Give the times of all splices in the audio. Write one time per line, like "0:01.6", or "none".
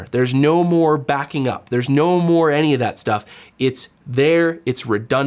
none